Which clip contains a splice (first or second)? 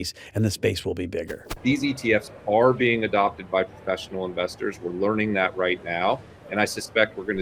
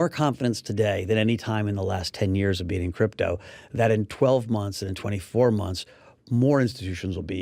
first